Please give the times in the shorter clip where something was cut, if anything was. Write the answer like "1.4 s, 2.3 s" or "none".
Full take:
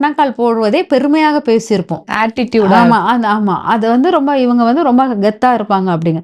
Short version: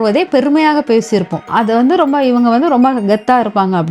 1.5 s